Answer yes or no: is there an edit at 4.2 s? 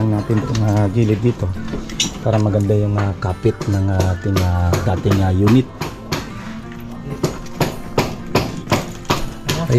no